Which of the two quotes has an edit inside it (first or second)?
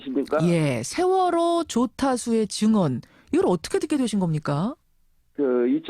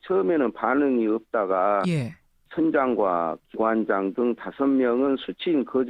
first